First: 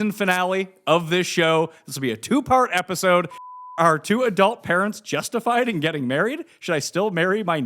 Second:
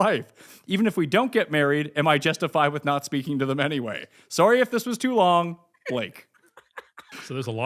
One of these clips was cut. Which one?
first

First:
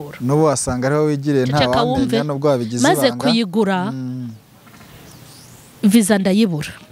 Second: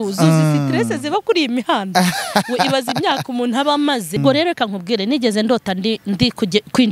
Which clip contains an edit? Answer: second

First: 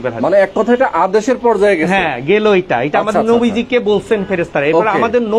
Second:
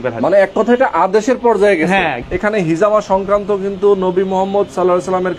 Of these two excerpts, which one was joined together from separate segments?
second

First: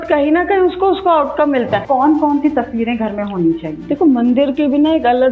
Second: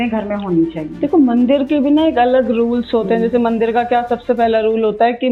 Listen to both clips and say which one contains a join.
first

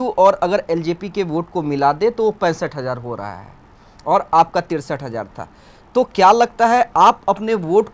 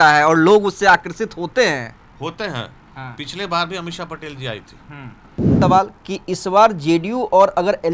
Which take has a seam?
second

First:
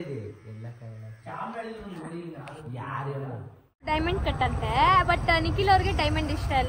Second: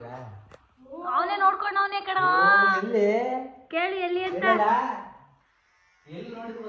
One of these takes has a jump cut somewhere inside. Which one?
first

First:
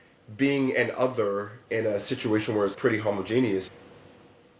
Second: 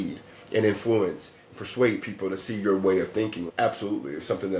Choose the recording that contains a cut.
second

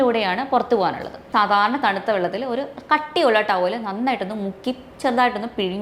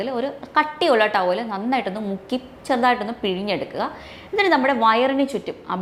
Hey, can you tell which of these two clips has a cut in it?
first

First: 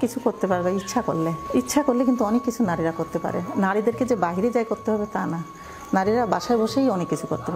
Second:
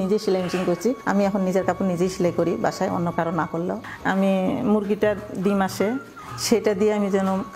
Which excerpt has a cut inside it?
second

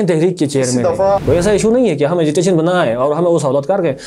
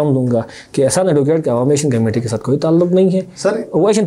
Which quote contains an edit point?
first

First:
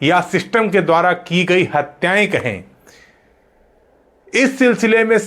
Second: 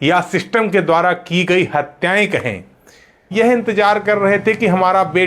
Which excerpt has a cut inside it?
second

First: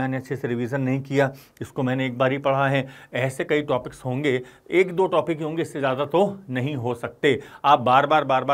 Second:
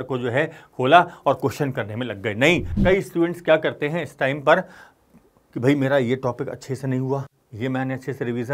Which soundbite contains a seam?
second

